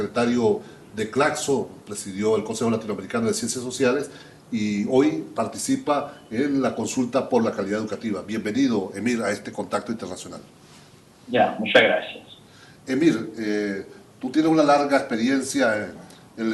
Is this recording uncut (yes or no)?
no